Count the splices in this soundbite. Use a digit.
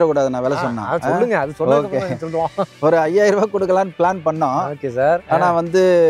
0